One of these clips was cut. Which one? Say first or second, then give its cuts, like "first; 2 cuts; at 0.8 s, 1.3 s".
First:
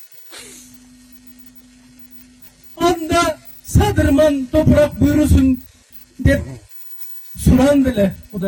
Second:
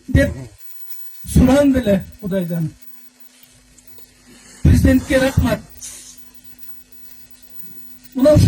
second; 1 cut; at 3.7 s